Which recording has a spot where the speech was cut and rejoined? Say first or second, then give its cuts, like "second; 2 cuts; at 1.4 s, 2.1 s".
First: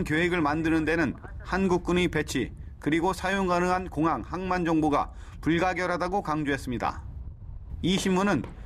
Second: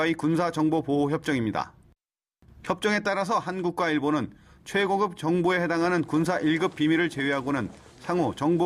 first; 1 cut; at 5.4 s